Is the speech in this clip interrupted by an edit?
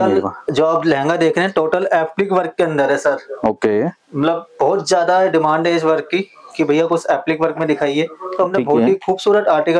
no; 0 cuts

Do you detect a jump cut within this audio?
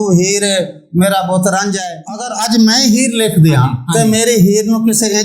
yes; 2 cuts; at 1.8 s, 3.8 s

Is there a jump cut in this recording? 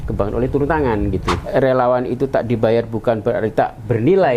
yes; 1 cut; at 1.4 s

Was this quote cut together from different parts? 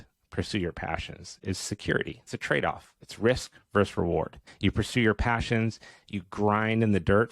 yes; 2 cuts; at 2.3 s, 4.4 s

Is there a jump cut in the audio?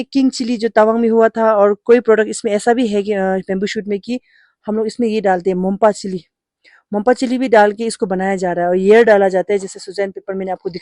no; 0 cuts

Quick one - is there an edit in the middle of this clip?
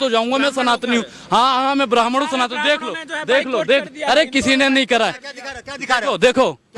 no; 0 cuts

